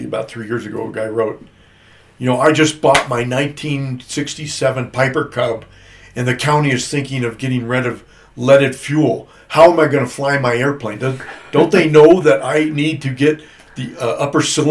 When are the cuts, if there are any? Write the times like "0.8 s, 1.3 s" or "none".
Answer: none